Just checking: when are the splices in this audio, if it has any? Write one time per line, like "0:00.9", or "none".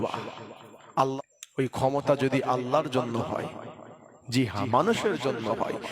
0:01.2